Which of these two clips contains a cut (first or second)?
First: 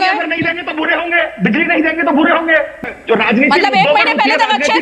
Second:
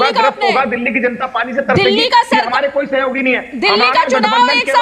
first